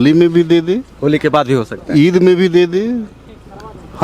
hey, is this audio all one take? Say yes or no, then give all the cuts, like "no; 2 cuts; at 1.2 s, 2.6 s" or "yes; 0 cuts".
yes; 0 cuts